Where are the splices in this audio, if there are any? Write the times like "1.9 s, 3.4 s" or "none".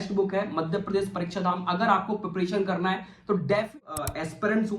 3.7 s